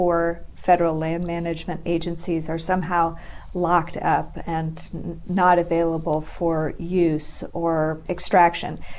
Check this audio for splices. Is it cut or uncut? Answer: cut